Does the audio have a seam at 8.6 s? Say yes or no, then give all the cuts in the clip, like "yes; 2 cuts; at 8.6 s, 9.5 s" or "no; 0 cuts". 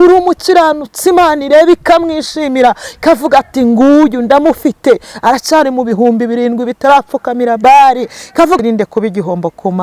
yes; 1 cut; at 8.6 s